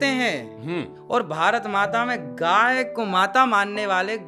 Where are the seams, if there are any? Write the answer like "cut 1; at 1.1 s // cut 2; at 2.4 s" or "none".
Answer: cut 1; at 1.0 s

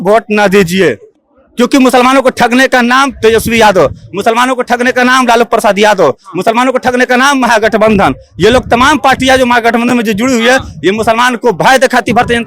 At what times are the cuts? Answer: none

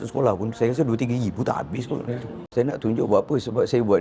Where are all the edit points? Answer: cut 1; at 2.4 s

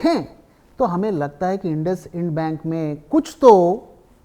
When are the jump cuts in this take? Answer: none

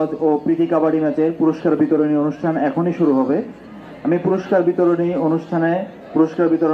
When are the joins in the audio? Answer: none

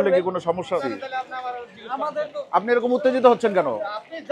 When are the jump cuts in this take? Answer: cut 1; at 0.9 s

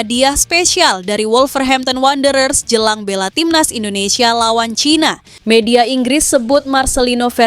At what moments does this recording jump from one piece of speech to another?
cut 1; at 5.3 s

